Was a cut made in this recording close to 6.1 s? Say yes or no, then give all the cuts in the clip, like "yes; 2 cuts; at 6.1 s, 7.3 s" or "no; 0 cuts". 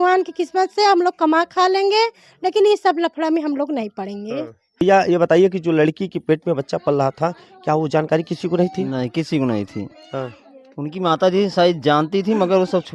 no; 1 cut; at 4.8 s